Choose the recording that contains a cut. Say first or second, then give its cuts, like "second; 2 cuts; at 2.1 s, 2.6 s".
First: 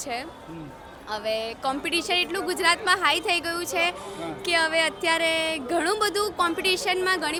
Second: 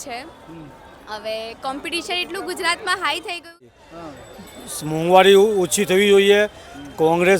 second; 1 cut; at 3.7 s